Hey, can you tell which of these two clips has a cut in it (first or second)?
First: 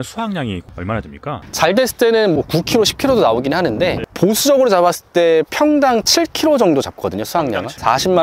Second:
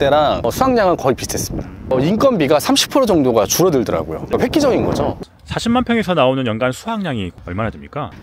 second